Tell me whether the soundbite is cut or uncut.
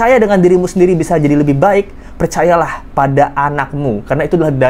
uncut